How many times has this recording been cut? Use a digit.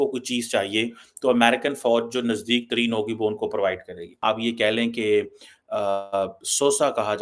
1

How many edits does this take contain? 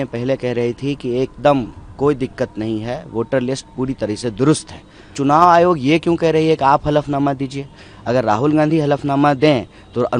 1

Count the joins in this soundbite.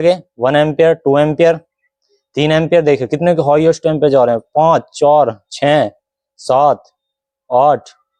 0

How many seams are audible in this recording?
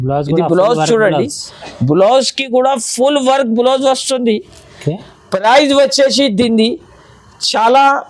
0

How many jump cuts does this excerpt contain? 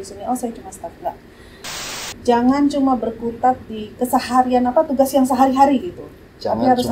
1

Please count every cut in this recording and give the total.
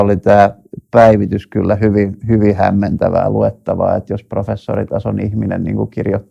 0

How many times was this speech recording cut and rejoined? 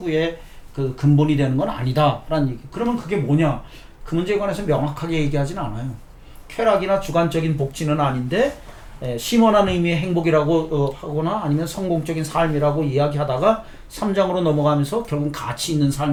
0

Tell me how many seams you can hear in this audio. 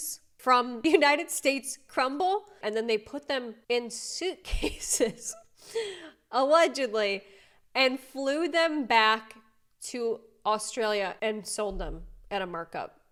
0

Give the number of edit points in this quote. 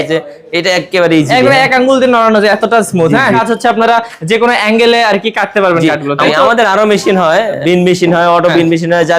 3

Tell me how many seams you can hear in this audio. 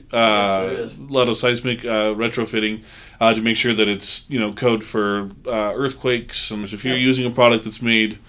1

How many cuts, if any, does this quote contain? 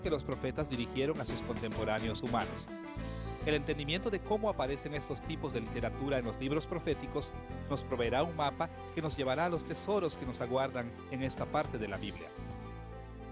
0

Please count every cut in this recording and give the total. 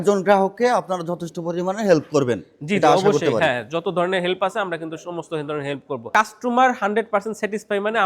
1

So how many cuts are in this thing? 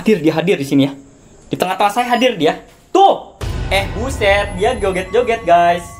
0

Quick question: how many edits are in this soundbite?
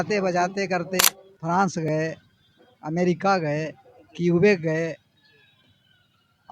1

